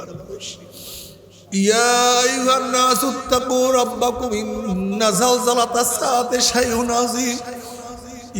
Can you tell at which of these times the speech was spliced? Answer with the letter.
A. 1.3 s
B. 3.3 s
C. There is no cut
A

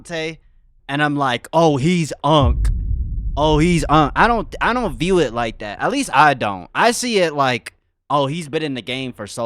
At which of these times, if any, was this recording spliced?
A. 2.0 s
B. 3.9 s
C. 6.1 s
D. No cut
D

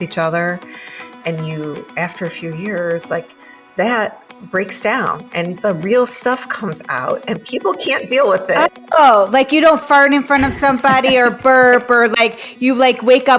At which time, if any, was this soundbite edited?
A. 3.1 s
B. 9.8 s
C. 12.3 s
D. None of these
B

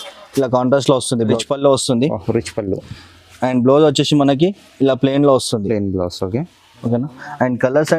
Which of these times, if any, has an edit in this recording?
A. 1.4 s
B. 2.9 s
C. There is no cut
A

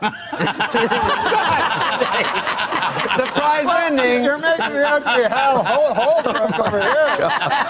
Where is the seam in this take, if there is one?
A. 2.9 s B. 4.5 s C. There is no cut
C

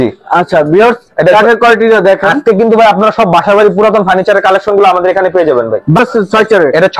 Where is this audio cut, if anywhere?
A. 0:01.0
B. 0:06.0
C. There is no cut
B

